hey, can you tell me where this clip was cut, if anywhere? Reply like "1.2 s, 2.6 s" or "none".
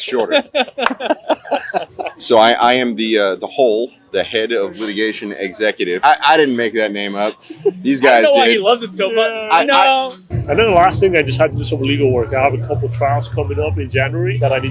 2.0 s, 10.2 s